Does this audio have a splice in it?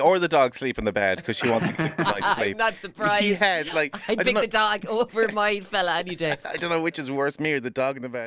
no; 0 cuts

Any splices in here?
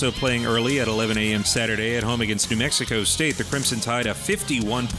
no; 0 cuts

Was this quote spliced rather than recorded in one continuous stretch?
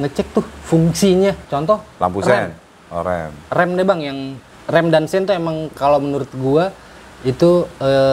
no; 0 cuts

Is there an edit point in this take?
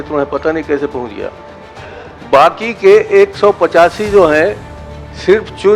no; 0 cuts

